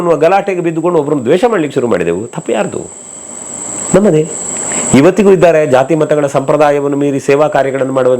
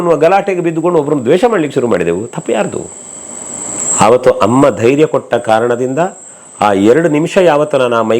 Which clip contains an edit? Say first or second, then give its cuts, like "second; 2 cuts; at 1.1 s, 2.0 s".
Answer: second; 1 cut; at 3.7 s